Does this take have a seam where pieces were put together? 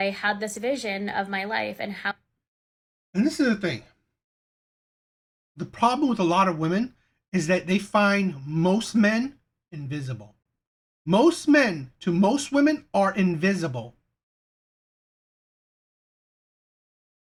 no; 0 cuts

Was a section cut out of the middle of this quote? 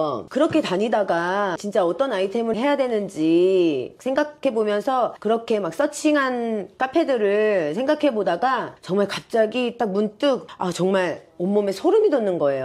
yes; 5 cuts; at 1.6 s, 3.9 s, 5.2 s, 8.8 s, 10.5 s

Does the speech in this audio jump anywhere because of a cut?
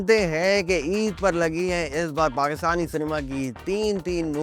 no; 0 cuts

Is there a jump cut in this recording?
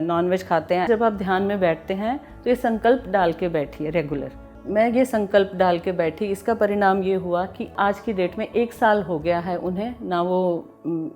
yes; 3 cuts; at 0.9 s, 4.5 s, 7.7 s

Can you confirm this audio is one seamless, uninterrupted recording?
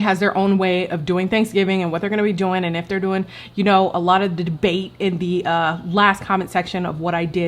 yes; 0 cuts

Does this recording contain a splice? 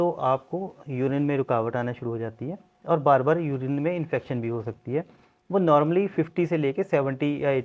no; 0 cuts

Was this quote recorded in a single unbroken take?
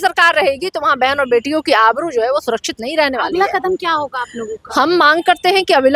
yes; 0 cuts

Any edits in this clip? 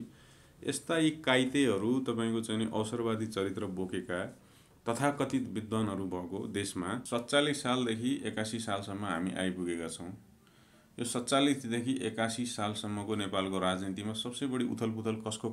yes; 1 cut; at 7.0 s

